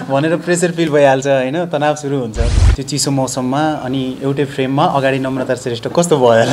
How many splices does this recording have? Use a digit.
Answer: 1